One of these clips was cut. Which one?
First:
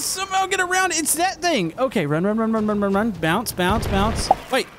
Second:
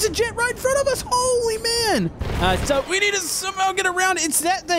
second; 1 cut; at 2.2 s

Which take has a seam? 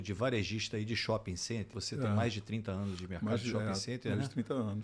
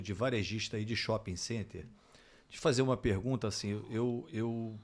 first; 1 cut; at 1.8 s

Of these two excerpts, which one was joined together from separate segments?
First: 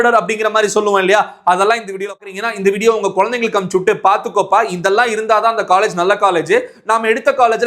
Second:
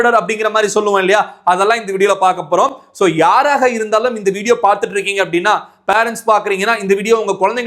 first; 1 cut; at 2.2 s

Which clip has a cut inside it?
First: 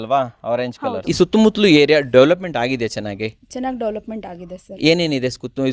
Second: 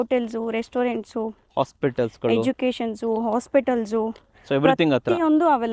first; 1 cut; at 1.0 s

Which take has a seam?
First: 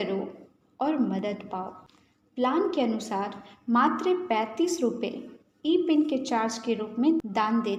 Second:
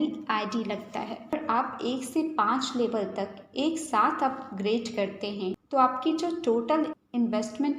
second; 1 cut; at 1.3 s

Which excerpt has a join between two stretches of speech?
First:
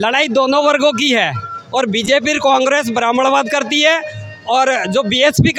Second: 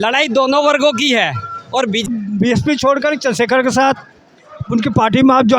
second; 1 cut; at 2.1 s

